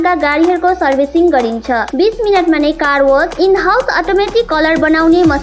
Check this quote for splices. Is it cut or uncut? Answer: uncut